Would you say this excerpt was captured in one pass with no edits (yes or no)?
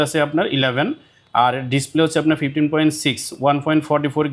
yes